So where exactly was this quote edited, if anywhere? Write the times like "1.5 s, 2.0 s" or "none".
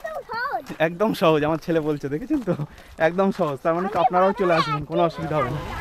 none

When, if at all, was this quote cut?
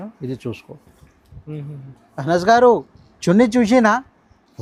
none

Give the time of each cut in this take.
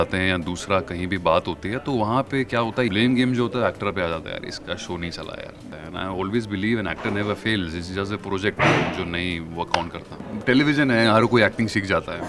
2.9 s, 5.6 s, 10.2 s

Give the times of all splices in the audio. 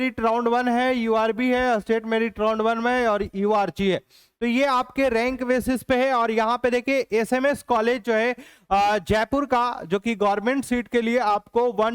none

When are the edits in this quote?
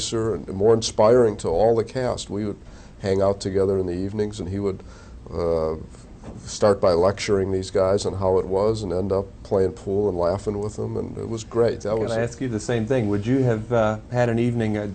none

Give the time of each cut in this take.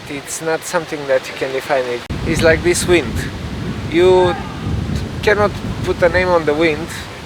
2.1 s

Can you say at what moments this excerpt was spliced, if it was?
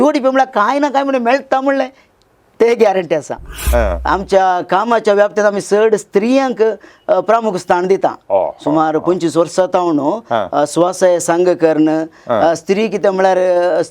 3.6 s

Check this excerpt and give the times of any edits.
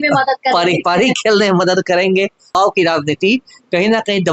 2.6 s

